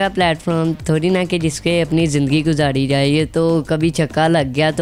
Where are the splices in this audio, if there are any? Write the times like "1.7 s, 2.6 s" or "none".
none

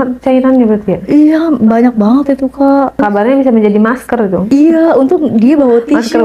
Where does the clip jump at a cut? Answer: 3.0 s, 4.4 s

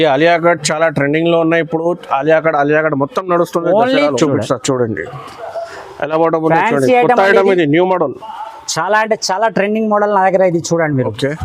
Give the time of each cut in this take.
4.1 s

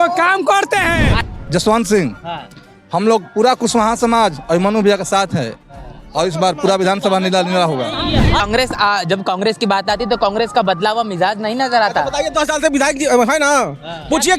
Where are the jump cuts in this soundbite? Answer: 1.1 s, 8.4 s

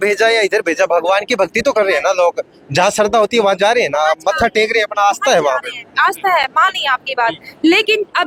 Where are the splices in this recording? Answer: none

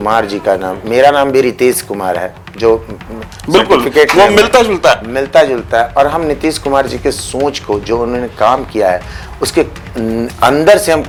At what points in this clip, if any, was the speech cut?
none

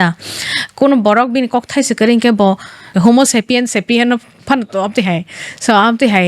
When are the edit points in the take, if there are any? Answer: 2.9 s

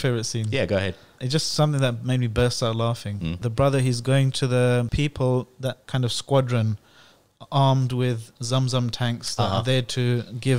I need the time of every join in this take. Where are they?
1.2 s, 3.4 s, 4.9 s, 5.8 s

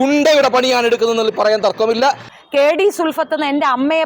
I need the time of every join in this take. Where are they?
2.3 s

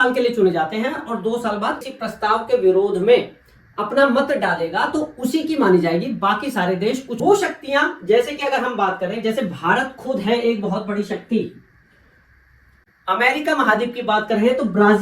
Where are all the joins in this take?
1.8 s, 7.1 s

